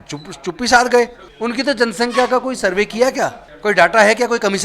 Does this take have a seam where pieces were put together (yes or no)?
yes